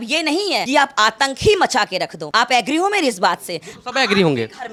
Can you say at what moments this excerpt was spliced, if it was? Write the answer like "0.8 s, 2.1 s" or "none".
none